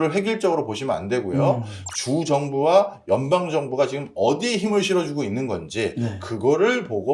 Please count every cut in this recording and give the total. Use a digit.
0